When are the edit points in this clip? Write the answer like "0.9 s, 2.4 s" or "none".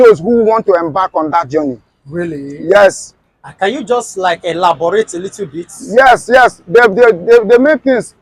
none